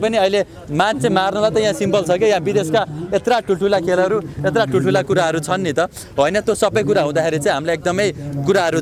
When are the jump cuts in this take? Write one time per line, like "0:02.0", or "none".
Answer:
none